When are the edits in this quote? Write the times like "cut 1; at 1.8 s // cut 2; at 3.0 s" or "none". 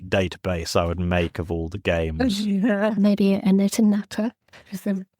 cut 1; at 2.9 s